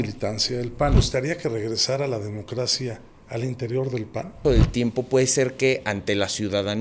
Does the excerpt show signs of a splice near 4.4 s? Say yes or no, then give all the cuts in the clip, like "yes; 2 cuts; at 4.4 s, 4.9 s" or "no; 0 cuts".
yes; 2 cuts; at 0.9 s, 4.4 s